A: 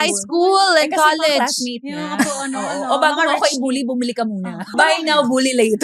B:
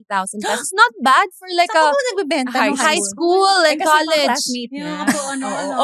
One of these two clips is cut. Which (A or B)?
A